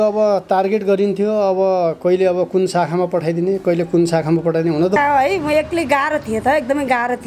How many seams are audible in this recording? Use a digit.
1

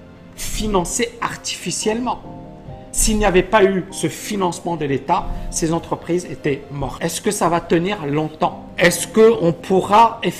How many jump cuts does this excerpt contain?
2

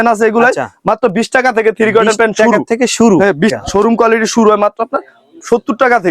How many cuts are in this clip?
1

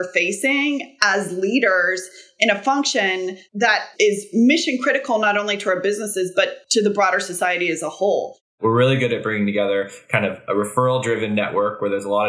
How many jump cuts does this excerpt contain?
1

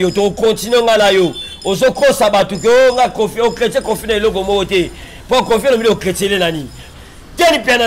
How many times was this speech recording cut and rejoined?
1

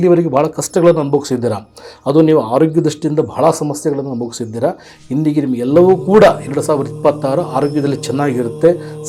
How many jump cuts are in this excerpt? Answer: 0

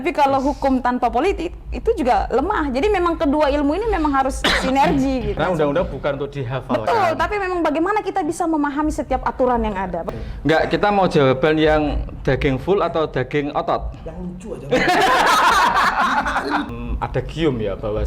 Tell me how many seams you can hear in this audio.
3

